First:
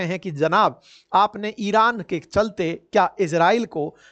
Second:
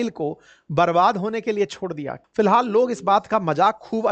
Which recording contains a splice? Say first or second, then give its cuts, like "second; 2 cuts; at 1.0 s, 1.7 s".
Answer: second; 1 cut; at 2.1 s